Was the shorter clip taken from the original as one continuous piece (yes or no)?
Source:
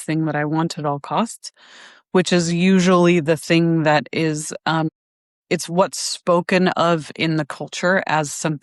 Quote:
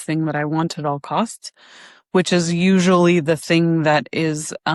yes